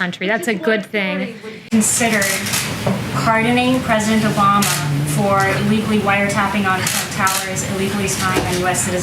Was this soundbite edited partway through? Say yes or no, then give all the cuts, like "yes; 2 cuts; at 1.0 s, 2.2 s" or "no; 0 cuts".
yes; 1 cut; at 1.7 s